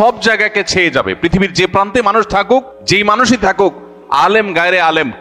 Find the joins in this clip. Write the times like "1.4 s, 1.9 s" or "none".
2.8 s